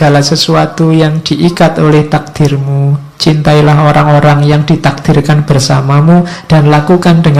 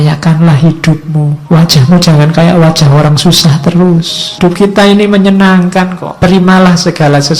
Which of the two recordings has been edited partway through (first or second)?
second